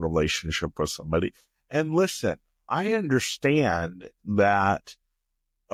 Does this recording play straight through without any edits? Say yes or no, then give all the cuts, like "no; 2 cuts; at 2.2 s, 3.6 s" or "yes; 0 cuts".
yes; 0 cuts